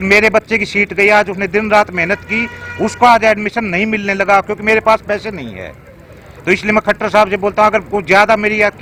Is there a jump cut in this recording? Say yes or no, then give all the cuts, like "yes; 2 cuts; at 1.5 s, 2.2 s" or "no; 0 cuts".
no; 0 cuts